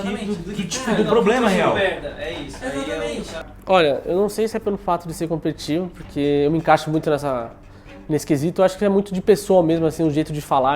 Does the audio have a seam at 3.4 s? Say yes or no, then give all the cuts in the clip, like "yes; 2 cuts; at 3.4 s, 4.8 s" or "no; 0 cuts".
yes; 1 cut; at 3.4 s